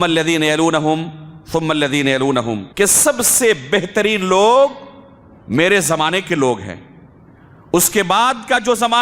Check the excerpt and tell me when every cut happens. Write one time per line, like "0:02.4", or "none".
0:02.7